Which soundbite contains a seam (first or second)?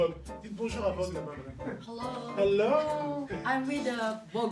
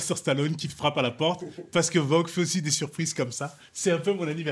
first